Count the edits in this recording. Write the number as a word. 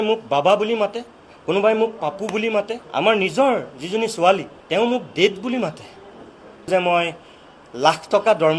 three